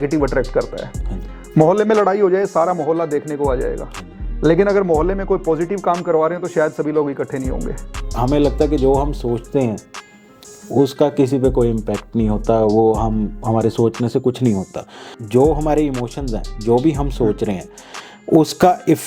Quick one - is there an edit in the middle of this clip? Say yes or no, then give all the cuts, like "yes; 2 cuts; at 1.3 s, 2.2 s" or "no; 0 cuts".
yes; 2 cuts; at 8.0 s, 15.1 s